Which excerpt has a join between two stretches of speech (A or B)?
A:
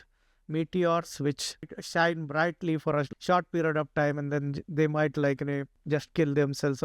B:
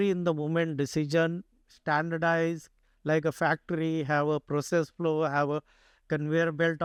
A